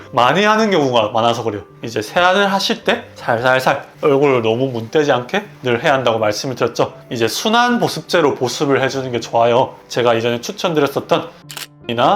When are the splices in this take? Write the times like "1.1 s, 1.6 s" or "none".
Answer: 1.7 s, 7.0 s